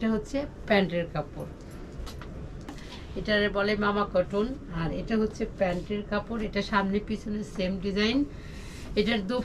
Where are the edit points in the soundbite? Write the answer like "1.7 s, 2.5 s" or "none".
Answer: 2.7 s